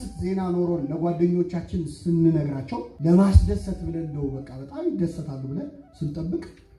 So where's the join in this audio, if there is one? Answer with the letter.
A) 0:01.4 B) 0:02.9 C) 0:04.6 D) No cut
B